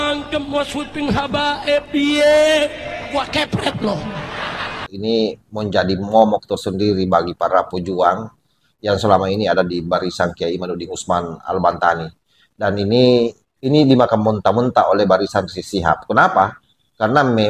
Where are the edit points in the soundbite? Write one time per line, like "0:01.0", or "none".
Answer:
0:04.8